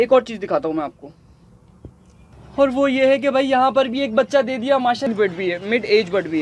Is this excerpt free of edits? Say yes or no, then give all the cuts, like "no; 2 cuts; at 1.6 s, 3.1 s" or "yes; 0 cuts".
no; 1 cut; at 5.1 s